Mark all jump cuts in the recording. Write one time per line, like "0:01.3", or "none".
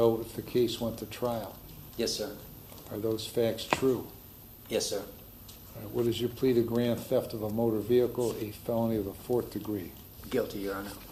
none

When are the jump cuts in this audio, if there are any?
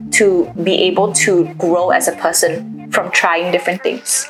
none

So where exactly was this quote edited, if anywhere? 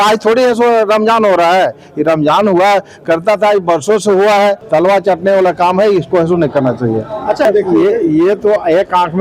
0:04.6
0:07.5

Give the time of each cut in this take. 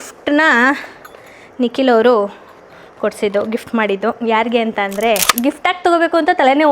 0:05.3

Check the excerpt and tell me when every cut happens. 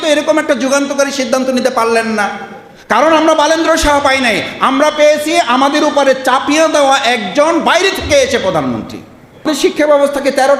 0:09.5

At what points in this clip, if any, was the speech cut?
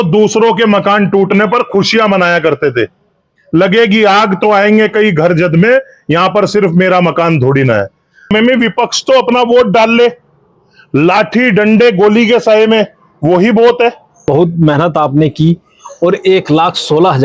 0:08.3
0:14.2

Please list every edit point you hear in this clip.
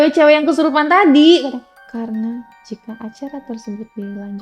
0:01.8

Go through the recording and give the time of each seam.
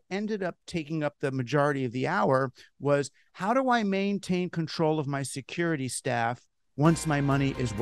none

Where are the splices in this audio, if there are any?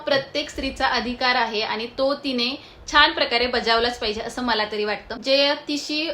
0:05.1

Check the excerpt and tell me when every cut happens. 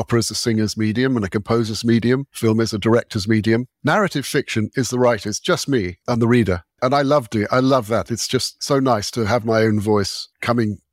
0:06.7

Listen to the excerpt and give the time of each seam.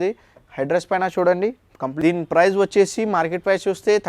0:01.9

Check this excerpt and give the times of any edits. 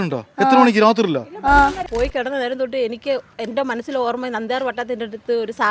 0:01.8

